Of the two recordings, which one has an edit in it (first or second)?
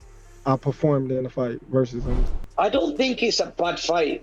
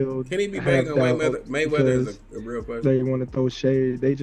first